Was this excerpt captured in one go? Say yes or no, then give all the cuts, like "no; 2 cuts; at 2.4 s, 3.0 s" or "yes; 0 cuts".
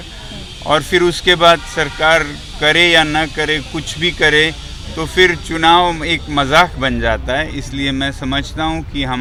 yes; 0 cuts